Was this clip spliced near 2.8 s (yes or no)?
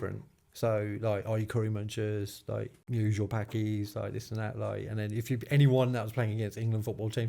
yes